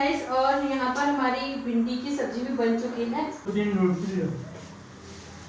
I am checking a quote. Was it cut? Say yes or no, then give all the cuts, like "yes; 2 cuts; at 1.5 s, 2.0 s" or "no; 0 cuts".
yes; 1 cut; at 3.4 s